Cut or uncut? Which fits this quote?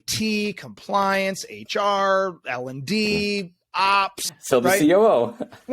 cut